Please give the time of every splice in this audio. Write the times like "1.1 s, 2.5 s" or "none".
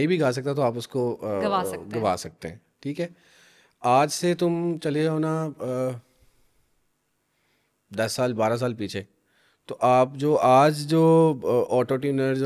none